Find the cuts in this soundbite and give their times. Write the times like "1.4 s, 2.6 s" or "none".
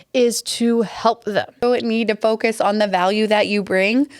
1.6 s